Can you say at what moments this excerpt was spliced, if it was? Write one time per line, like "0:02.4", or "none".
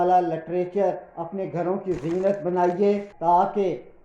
0:03.1